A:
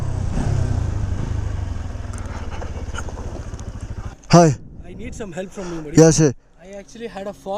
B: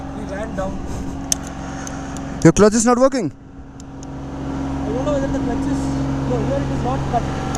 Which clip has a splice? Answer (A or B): A